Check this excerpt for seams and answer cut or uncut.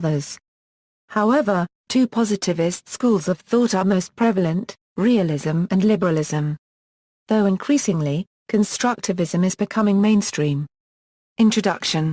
uncut